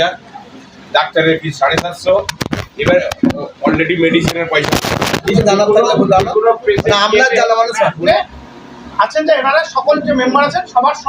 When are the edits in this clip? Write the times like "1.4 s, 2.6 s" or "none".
5.2 s, 8.0 s